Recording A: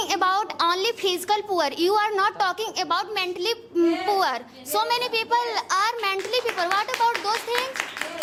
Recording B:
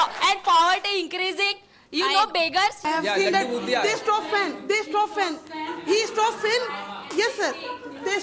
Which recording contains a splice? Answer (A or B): B